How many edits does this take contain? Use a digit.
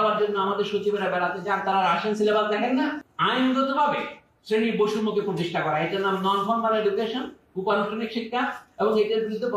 1